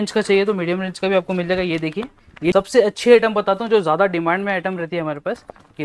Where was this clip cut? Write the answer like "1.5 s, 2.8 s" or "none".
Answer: 2.5 s